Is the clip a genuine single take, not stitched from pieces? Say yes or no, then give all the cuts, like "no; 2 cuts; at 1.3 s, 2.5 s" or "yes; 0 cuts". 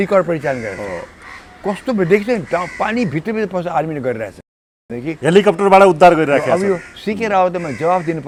yes; 0 cuts